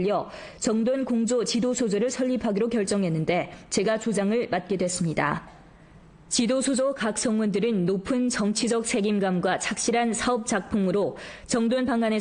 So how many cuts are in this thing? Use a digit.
1